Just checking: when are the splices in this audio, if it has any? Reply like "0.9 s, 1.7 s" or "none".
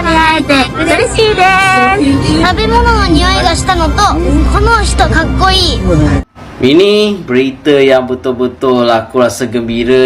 6.2 s

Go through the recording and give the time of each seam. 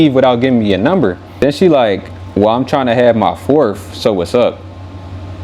1.3 s

